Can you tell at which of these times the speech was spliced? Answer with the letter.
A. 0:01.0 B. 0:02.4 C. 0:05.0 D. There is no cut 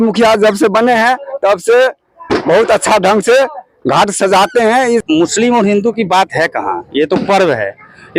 C